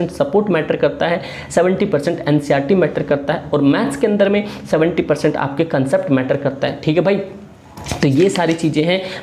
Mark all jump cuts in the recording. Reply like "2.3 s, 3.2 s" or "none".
none